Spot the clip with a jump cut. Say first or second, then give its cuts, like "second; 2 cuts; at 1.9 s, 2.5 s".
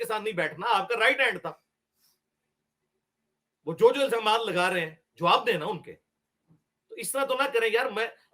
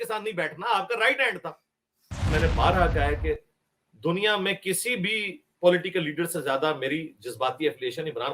second; 1 cut; at 2.3 s